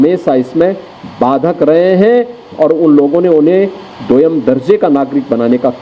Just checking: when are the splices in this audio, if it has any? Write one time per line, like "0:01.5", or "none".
none